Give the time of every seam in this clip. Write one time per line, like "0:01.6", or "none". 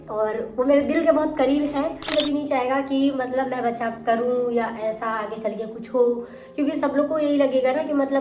0:02.1